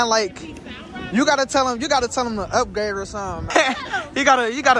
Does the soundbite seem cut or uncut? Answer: cut